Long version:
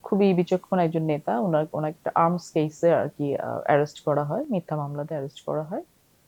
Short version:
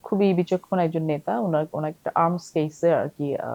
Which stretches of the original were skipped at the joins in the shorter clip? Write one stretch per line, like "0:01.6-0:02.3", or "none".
none

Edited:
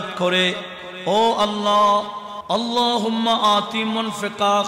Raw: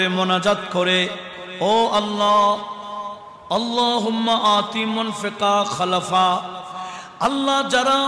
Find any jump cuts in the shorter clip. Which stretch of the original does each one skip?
0:02.9-0:03.3

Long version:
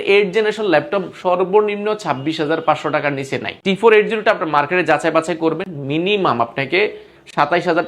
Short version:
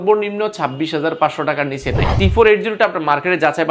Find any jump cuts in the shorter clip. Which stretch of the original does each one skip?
none

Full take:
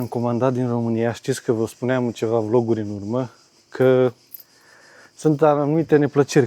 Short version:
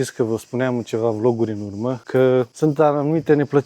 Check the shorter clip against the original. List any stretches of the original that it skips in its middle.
0:03.3-0:03.7
0:04.2-0:05.1

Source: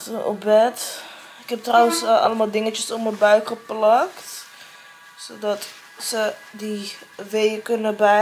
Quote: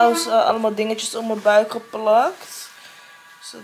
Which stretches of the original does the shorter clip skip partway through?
none

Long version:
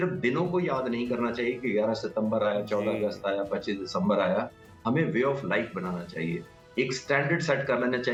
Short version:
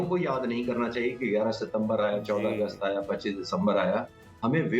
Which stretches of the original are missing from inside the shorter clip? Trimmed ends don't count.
none

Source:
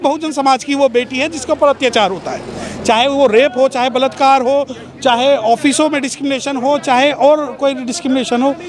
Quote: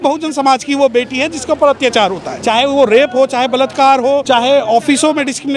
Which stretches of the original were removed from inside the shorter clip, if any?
0:02.3-0:02.7
0:04.7-0:05.0

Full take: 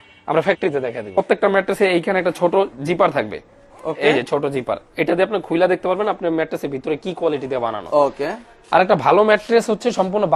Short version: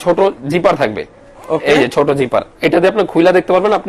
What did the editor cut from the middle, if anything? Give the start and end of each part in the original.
none

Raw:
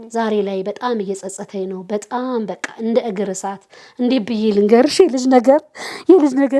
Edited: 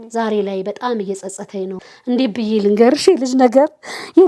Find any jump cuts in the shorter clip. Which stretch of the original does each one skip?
0:01.8-0:03.7

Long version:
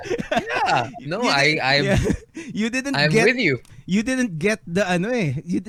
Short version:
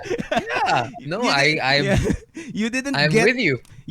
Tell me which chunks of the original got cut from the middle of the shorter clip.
none

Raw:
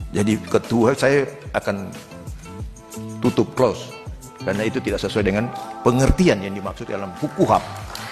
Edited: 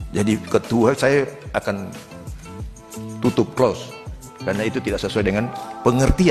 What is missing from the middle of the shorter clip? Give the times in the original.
none

